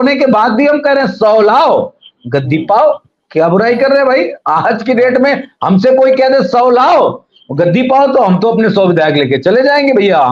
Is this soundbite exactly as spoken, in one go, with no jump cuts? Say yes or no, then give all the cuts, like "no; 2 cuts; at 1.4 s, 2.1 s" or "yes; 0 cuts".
yes; 0 cuts